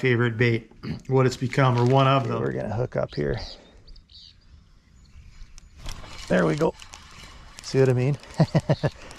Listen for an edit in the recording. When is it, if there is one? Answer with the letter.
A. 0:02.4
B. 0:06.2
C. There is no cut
A